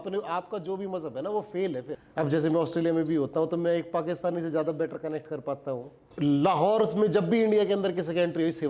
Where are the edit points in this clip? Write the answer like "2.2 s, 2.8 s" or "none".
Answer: 1.9 s, 6.1 s